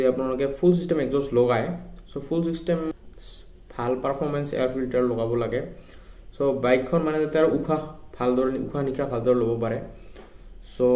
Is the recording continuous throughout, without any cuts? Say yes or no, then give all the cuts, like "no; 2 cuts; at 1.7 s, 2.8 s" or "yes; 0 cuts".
no; 1 cut; at 2.9 s